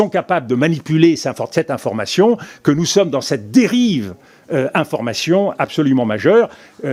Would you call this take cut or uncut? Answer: uncut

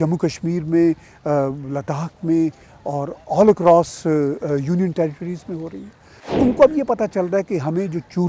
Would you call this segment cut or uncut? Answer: cut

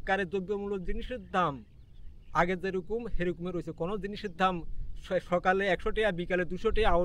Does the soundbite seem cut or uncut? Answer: uncut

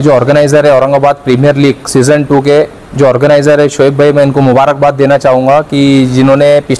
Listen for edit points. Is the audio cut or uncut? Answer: uncut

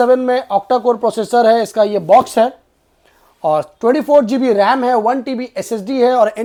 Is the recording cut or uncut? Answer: uncut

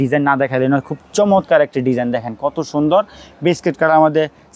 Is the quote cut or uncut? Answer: uncut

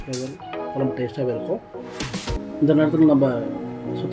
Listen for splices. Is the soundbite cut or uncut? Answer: cut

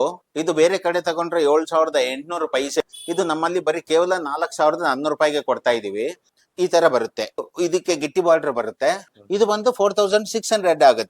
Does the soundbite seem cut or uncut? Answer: cut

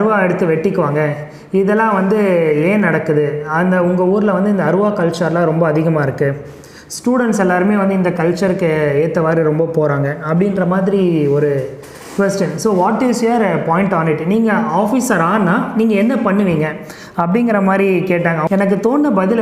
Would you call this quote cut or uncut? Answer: cut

